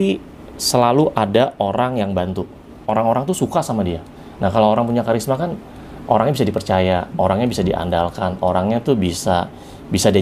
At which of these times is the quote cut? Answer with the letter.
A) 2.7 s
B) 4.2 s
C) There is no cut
A